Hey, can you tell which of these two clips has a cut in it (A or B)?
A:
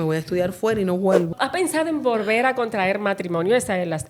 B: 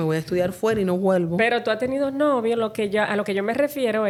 A